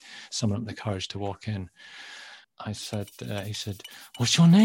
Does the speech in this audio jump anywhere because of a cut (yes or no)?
yes